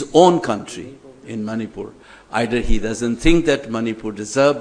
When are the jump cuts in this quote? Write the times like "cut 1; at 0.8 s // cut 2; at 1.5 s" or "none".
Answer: none